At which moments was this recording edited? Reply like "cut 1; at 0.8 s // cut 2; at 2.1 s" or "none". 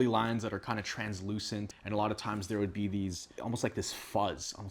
none